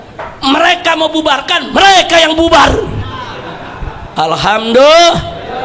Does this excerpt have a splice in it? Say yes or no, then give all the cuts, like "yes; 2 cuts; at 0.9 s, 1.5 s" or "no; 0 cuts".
no; 0 cuts